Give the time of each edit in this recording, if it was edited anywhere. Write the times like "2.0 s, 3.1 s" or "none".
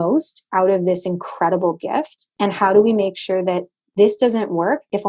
2.2 s